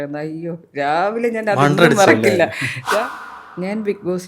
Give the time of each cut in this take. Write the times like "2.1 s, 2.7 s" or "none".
3.0 s